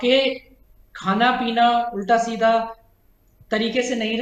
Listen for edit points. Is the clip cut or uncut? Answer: uncut